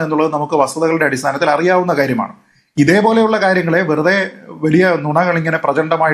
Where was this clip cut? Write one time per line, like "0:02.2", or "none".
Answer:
none